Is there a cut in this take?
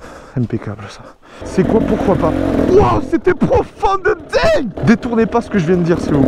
yes; 2 cuts; at 1.4 s, 4.7 s

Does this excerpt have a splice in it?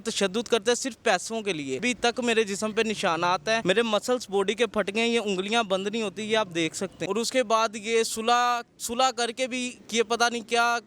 yes; 3 cuts; at 1.8 s, 3.6 s, 7.0 s

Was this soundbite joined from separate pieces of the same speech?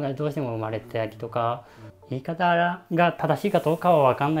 yes; 1 cut; at 1.9 s

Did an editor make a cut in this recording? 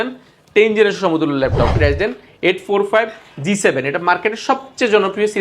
yes; 1 cut; at 1.7 s

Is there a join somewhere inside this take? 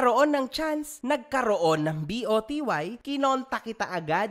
yes; 1 cut; at 0.9 s

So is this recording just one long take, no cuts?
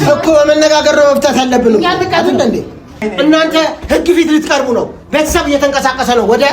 no; 1 cut; at 3.0 s

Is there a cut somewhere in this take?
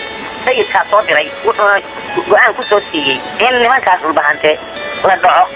no; 0 cuts

